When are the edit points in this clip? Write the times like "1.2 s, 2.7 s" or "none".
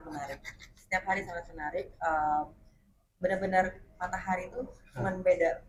none